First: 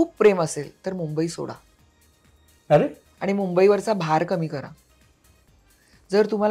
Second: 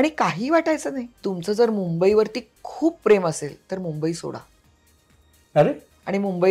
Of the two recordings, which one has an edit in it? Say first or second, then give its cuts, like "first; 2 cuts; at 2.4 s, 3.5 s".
second; 1 cut; at 1.1 s